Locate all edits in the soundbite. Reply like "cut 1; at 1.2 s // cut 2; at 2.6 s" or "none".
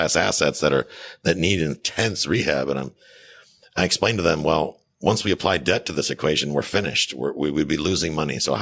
none